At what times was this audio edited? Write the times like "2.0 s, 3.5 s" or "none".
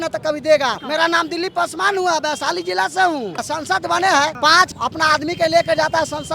0.8 s, 3.4 s, 4.4 s